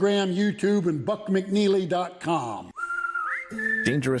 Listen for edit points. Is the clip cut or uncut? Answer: cut